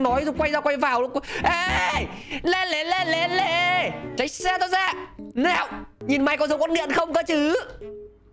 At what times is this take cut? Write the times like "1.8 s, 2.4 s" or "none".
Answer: 4.1 s, 5.9 s